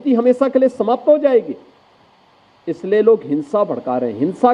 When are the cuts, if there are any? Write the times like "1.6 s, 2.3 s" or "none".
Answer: none